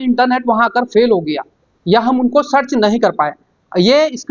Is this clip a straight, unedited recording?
yes; 0 cuts

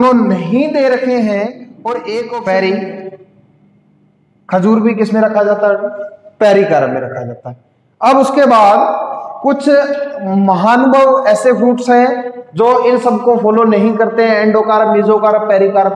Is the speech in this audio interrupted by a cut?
yes; 1 cut; at 2.3 s

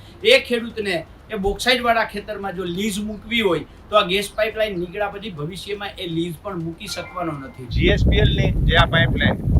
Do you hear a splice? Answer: yes; 1 cut; at 7.6 s

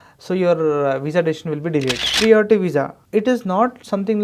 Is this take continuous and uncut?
no; 2 cuts; at 2.0 s, 3.0 s

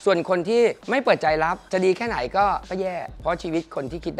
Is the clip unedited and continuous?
no; 1 cut; at 3.1 s

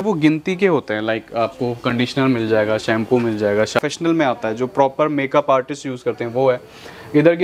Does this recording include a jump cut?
yes; 1 cut; at 3.8 s

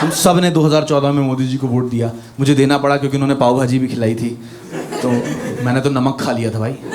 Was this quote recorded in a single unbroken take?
yes; 0 cuts

